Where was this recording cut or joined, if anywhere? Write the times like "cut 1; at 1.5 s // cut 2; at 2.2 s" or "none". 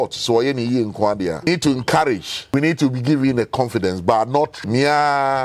cut 1; at 1.4 s // cut 2; at 2.5 s // cut 3; at 4.6 s